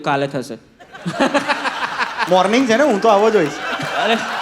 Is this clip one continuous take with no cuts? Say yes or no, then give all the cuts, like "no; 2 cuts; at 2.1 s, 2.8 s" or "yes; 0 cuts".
no; 1 cut; at 2.3 s